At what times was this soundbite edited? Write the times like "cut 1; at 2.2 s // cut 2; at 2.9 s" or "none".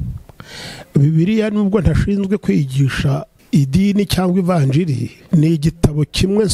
cut 1; at 3.3 s // cut 2; at 5.1 s